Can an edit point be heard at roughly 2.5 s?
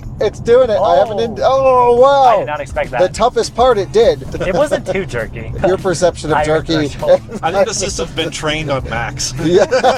no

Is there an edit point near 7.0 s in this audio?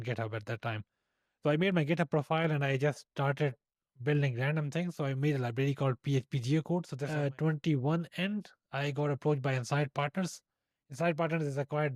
yes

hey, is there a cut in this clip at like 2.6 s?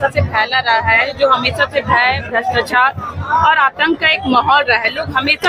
no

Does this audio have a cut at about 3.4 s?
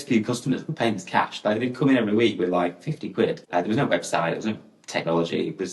yes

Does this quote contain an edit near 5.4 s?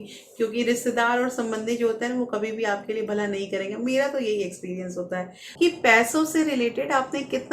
yes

